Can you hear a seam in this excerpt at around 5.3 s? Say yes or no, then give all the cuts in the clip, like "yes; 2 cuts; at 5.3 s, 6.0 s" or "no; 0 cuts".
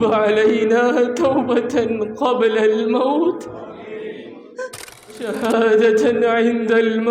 yes; 1 cut; at 5.3 s